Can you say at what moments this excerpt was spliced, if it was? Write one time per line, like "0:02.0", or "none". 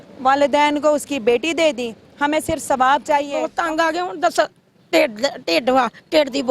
0:03.5